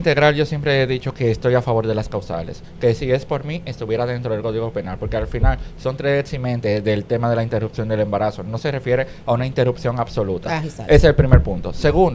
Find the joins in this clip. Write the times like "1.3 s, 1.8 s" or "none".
none